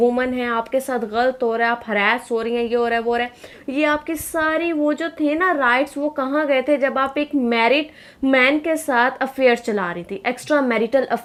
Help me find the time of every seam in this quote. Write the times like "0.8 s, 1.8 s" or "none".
none